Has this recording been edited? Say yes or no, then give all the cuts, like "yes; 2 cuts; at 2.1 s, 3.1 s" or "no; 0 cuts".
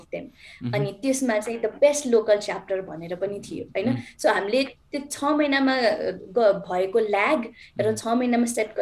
no; 0 cuts